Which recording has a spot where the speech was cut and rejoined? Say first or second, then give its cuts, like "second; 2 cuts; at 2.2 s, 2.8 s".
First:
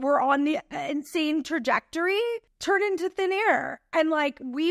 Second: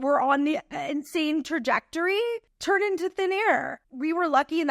second; 1 cut; at 3.8 s